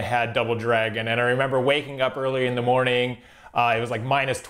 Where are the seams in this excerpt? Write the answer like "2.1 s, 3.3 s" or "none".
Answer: none